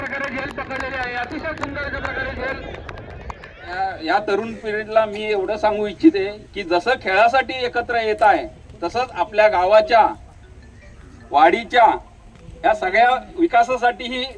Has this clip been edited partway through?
yes; 1 cut; at 3.6 s

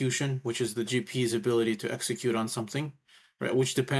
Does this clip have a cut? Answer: no; 0 cuts

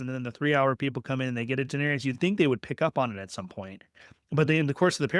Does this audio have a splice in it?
no; 0 cuts

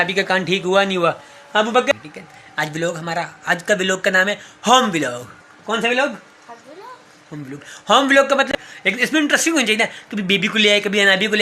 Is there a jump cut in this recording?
yes; 2 cuts; at 1.9 s, 8.5 s

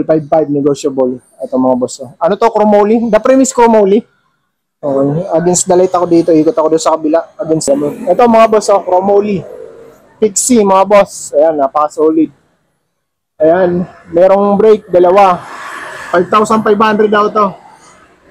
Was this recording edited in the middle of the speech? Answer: yes; 1 cut; at 7.7 s

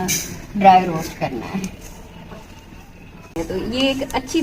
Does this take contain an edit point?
yes; 1 cut; at 3.4 s

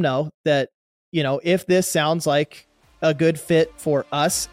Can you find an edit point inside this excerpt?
no; 0 cuts

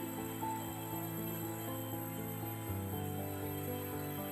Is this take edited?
no; 0 cuts

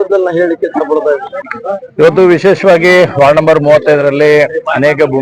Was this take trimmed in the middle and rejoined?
yes; 1 cut; at 1.5 s

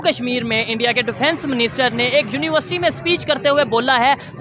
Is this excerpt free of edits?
yes; 0 cuts

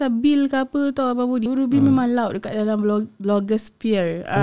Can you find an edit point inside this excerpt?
yes; 1 cut; at 1.5 s

